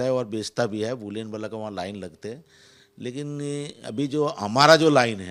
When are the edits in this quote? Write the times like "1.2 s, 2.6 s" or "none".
none